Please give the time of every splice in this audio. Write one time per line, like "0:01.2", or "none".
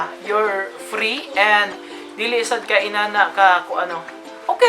none